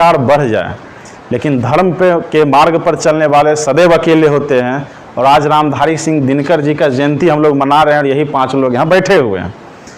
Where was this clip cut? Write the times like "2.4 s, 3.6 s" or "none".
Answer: none